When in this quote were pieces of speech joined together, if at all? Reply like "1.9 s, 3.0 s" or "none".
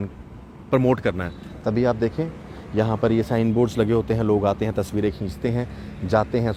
none